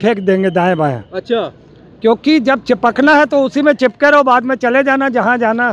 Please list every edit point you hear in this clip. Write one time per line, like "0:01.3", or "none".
none